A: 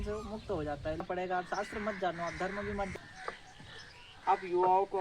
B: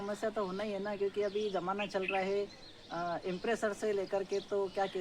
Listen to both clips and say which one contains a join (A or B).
A